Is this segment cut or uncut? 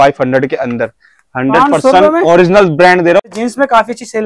cut